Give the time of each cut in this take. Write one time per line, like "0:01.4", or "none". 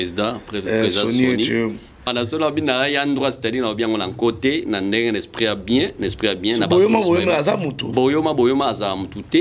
0:02.1